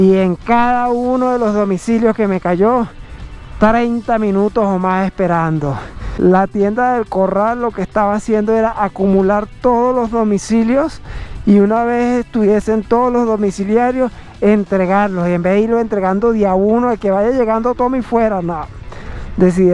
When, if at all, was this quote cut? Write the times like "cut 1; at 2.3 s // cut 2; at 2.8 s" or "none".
none